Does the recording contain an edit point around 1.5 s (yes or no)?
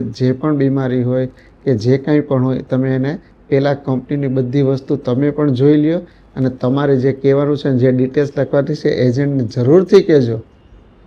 no